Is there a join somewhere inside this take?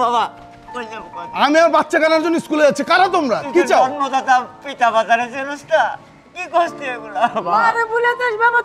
no; 0 cuts

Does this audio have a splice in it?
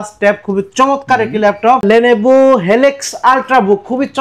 no; 0 cuts

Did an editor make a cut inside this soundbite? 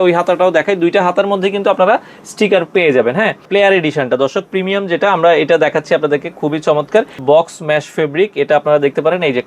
yes; 2 cuts; at 3.5 s, 7.1 s

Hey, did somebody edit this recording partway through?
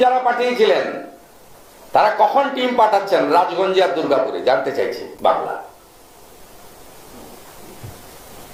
no; 0 cuts

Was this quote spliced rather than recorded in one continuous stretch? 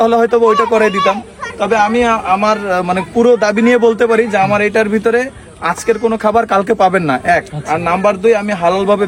no; 0 cuts

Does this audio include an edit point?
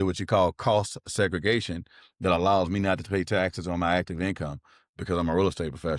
no; 0 cuts

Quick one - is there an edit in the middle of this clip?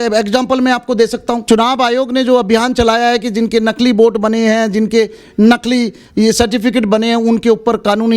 yes; 1 cut; at 1.4 s

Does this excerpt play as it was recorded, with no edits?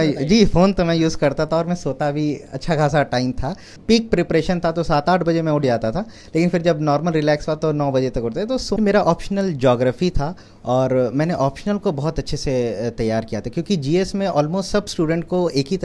no; 2 cuts; at 3.7 s, 8.8 s

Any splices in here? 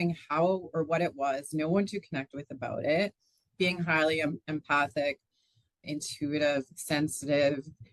no; 0 cuts

